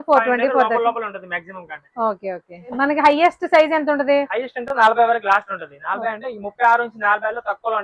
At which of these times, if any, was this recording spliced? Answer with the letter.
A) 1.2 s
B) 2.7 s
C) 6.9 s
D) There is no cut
B